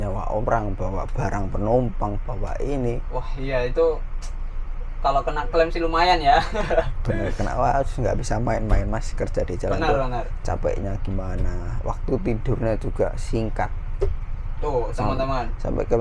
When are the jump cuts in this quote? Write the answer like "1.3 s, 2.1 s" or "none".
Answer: none